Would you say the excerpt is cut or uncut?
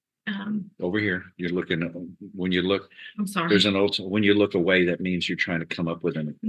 uncut